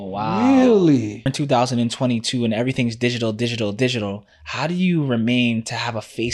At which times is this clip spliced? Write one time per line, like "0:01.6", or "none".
0:01.3